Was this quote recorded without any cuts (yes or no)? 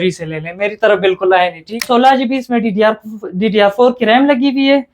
no